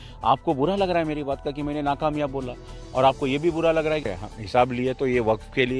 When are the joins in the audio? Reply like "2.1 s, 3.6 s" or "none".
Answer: 4.1 s

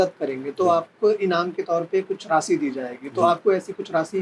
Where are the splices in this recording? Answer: none

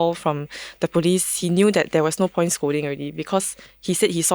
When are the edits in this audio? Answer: 1.3 s

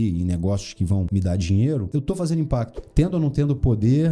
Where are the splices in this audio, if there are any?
1.1 s, 1.9 s, 2.8 s

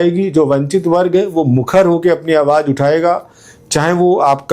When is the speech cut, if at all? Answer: none

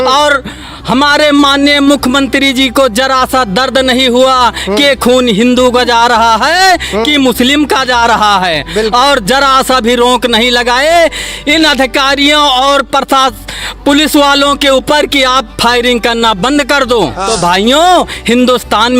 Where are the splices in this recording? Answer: 17.2 s

